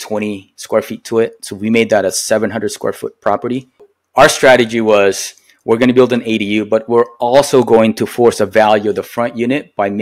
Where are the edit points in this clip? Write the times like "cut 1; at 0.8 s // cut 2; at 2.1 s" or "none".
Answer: cut 1; at 3.9 s